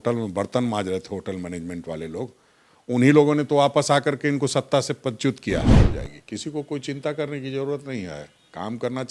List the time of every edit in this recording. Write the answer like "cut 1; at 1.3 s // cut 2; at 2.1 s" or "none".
cut 1; at 5.7 s